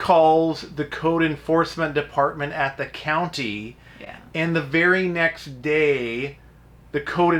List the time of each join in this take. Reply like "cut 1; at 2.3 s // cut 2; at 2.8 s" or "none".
none